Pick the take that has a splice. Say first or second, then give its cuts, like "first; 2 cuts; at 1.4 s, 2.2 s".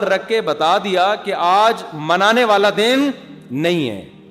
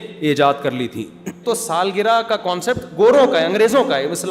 second; 1 cut; at 1.4 s